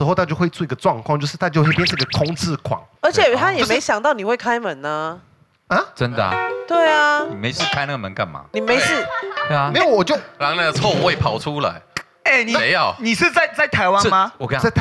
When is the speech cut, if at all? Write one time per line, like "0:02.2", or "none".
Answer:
none